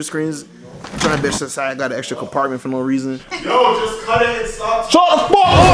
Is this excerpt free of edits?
no; 1 cut; at 3.2 s

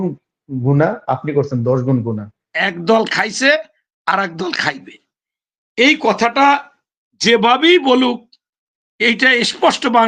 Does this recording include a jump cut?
yes; 1 cut; at 2.5 s

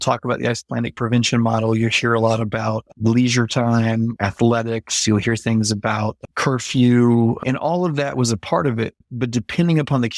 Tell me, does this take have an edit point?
yes; 2 cuts; at 7.4 s, 9.1 s

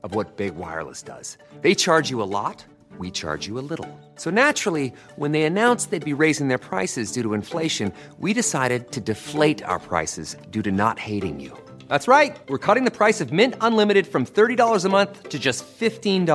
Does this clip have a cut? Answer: no; 0 cuts

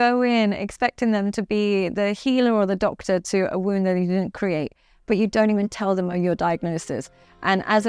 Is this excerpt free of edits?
yes; 0 cuts

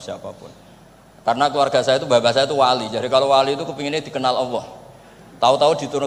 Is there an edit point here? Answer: no; 0 cuts

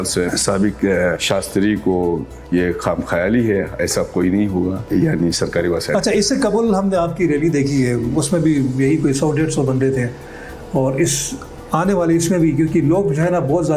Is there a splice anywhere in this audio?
no; 0 cuts

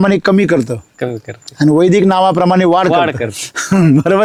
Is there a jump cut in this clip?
no; 0 cuts

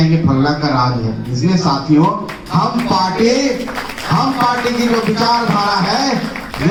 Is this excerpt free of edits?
yes; 0 cuts

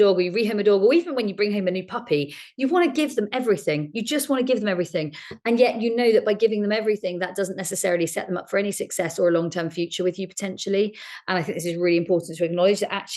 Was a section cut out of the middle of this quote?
no; 0 cuts

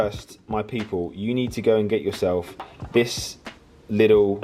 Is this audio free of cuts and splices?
yes; 0 cuts

